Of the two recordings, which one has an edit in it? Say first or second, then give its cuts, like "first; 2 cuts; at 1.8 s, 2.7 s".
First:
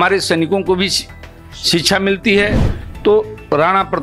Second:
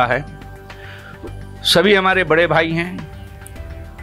first; 1 cut; at 2.6 s